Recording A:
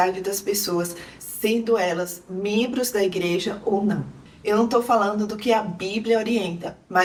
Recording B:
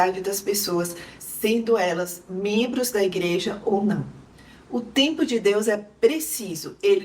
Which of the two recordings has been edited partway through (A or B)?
B